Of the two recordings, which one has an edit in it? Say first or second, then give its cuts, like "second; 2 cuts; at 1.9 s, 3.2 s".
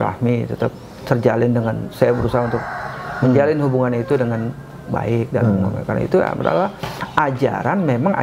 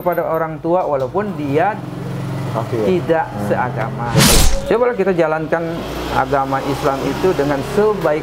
second; 1 cut; at 4.4 s